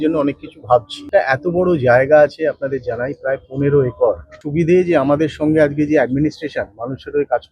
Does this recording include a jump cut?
yes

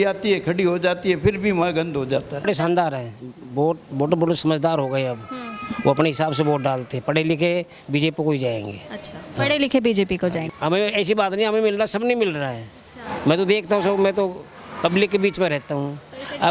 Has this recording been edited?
yes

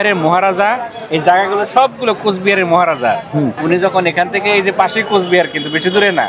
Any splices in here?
yes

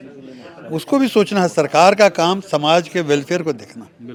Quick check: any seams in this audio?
no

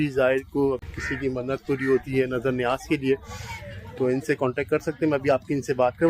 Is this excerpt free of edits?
yes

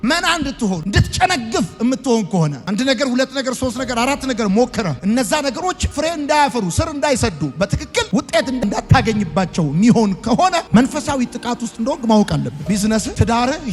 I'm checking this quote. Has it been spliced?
no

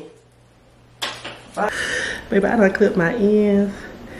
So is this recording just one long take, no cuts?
no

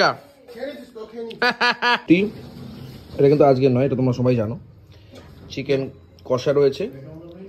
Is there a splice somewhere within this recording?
yes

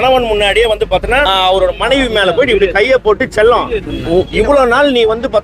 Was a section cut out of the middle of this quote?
yes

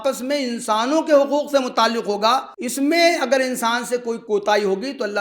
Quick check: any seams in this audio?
yes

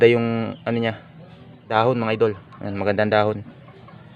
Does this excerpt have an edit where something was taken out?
yes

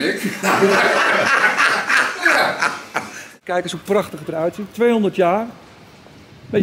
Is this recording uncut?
no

